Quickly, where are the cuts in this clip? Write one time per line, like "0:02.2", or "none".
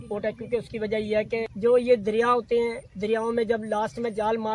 0:01.5